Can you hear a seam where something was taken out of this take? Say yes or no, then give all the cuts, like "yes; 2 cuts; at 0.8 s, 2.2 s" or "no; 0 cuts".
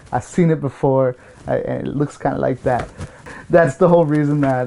yes; 1 cut; at 3.2 s